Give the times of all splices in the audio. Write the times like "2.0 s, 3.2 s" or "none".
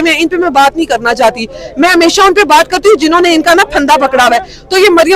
none